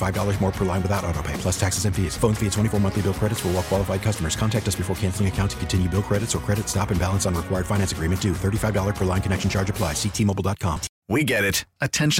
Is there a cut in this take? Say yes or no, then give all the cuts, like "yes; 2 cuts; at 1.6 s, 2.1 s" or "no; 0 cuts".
yes; 1 cut; at 10.9 s